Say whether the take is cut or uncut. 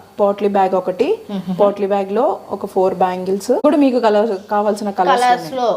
cut